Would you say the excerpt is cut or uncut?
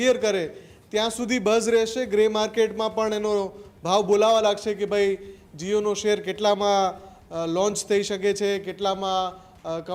uncut